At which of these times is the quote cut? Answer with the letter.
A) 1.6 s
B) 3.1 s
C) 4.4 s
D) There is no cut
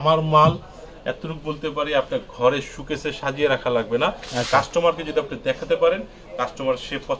D